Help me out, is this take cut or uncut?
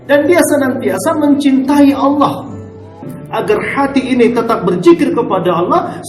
cut